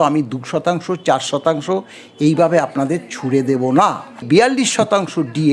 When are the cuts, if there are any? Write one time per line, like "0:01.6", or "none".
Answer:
0:04.2